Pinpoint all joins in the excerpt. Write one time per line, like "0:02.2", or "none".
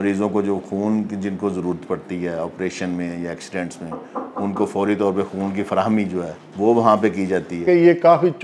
0:06.4
0:07.6